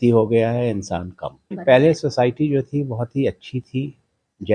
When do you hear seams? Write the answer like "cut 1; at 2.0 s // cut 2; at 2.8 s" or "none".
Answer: cut 1; at 1.5 s